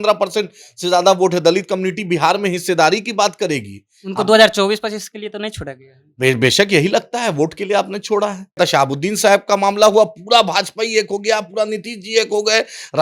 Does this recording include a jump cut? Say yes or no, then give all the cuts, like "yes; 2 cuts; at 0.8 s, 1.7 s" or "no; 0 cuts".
yes; 1 cut; at 8.6 s